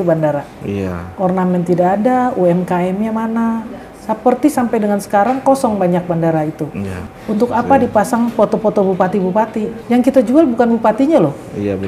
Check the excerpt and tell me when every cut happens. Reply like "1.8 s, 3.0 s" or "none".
7.1 s, 9.8 s